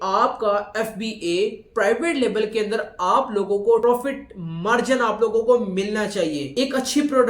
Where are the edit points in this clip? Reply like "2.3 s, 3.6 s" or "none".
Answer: 3.8 s

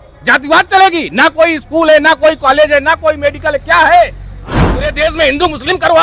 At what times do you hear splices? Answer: 4.7 s

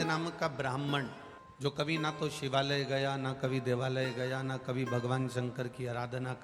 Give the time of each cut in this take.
1.0 s

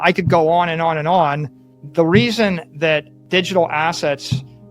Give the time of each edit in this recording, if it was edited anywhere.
3.1 s

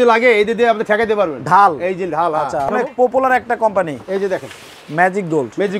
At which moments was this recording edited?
2.7 s

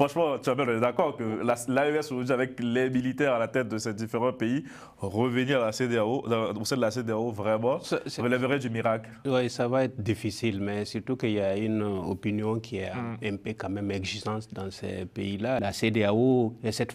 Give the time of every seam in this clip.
15.6 s

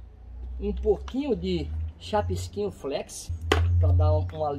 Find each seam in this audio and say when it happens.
3.3 s

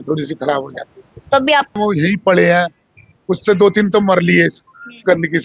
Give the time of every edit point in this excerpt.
1.7 s

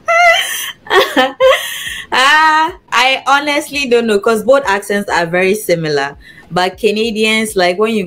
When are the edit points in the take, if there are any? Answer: none

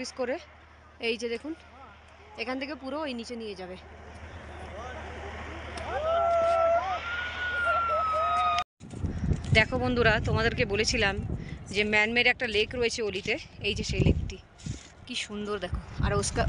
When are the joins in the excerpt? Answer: 8.7 s

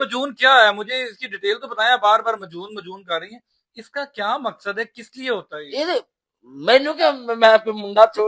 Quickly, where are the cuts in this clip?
none

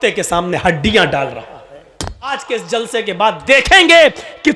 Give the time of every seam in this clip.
2.3 s

